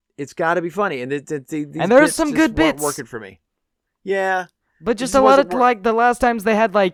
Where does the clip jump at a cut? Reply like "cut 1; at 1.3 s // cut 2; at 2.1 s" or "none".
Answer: none